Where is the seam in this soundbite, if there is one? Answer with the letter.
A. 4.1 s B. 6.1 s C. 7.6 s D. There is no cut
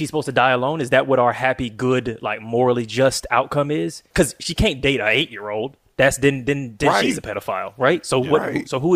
A